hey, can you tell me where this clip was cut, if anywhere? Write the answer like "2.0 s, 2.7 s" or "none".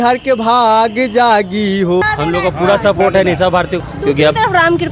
2.0 s, 3.8 s